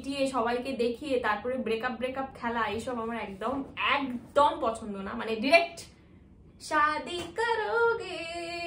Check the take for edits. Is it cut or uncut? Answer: uncut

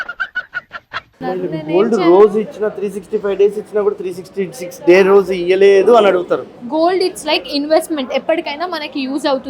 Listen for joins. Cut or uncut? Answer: uncut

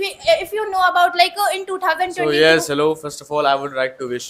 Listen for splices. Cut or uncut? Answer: uncut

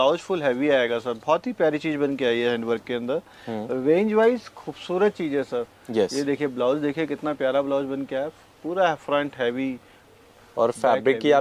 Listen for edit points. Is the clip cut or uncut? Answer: uncut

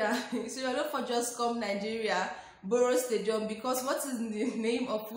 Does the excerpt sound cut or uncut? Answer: uncut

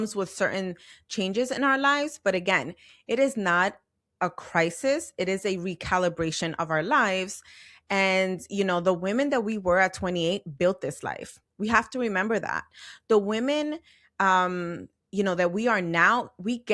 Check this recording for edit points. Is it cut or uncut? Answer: uncut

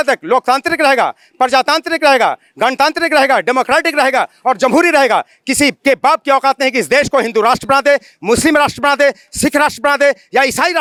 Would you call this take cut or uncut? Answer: uncut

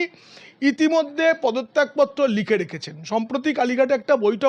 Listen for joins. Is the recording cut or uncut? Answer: uncut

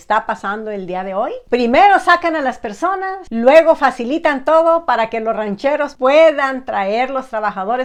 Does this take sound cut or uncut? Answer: uncut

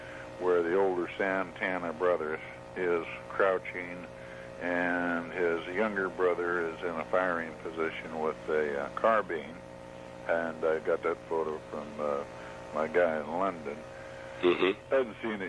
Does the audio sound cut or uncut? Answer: cut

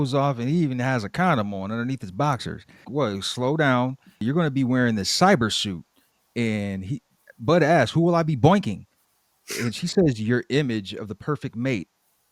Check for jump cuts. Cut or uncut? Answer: uncut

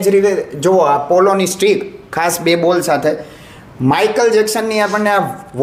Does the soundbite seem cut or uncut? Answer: uncut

